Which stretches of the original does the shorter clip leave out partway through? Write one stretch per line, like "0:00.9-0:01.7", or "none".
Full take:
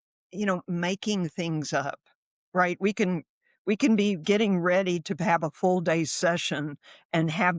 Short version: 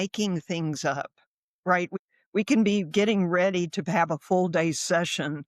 0:02.8-0:03.2